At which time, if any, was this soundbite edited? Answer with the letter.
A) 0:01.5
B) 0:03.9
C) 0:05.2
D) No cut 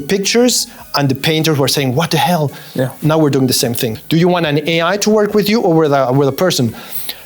B